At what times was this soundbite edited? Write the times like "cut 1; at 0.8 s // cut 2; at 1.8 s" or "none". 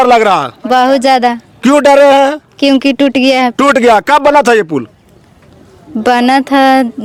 none